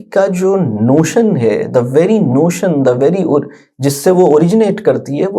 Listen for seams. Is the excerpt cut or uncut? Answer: uncut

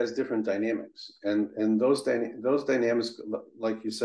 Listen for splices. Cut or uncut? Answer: uncut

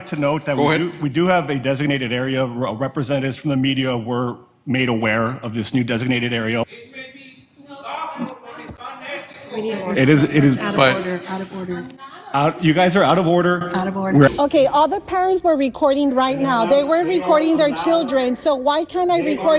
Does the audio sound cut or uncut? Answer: cut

